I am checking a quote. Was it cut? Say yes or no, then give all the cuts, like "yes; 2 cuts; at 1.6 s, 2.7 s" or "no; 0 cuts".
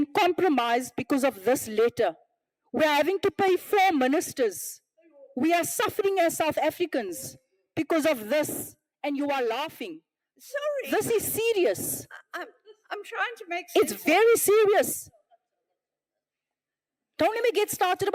no; 0 cuts